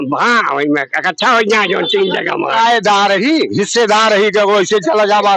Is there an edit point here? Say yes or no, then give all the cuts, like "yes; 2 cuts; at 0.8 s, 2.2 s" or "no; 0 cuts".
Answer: yes; 1 cut; at 2.5 s